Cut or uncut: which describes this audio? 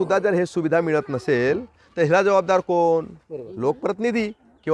uncut